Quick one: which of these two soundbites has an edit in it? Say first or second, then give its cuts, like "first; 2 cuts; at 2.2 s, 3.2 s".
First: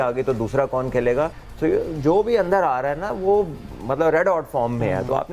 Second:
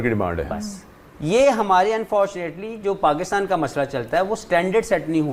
first; 1 cut; at 1.4 s